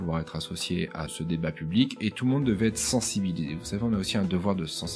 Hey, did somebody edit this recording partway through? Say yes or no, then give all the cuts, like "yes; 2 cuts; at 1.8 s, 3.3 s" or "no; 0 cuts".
yes; 1 cut; at 1.1 s